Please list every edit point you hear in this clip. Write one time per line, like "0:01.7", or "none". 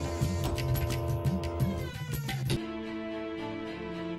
0:02.6